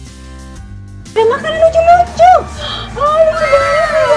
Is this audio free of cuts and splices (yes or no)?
no